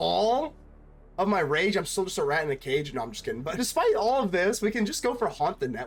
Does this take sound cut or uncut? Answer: cut